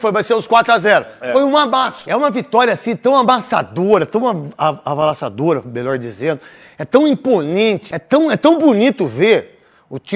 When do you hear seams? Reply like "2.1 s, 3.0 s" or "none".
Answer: 2.0 s, 7.9 s